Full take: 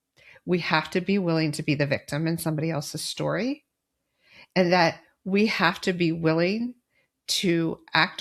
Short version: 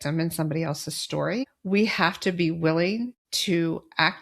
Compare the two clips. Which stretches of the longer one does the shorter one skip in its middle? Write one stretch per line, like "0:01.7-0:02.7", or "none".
0:03.6-0:05.2
0:06.9-0:07.2